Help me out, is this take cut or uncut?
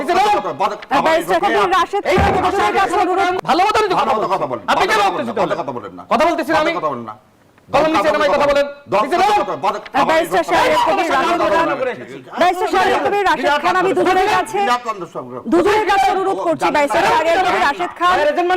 cut